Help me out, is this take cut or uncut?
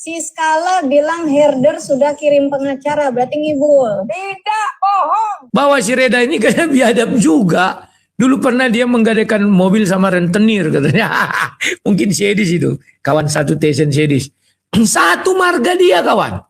cut